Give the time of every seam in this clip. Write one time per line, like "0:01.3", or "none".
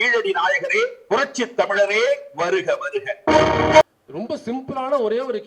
0:03.8